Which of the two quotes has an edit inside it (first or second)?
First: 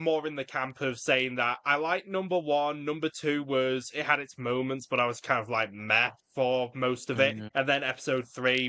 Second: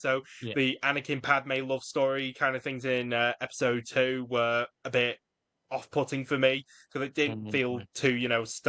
first